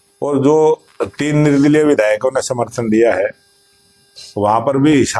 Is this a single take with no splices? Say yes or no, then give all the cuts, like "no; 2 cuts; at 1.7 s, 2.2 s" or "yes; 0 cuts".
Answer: yes; 0 cuts